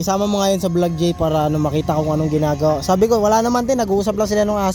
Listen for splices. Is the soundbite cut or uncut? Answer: uncut